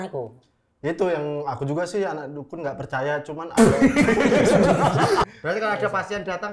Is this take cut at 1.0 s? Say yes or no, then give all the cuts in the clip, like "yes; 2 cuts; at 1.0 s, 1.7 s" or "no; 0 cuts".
no; 1 cut; at 5.3 s